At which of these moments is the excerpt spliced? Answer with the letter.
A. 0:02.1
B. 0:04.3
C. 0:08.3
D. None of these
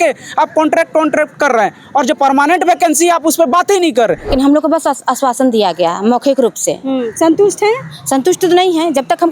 B